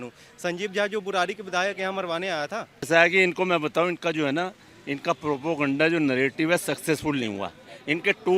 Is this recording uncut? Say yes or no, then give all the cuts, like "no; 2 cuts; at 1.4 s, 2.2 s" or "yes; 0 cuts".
no; 1 cut; at 2.9 s